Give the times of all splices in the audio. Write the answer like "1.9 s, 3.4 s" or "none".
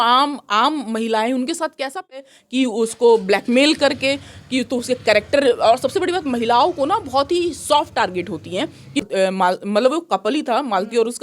2.3 s, 9.0 s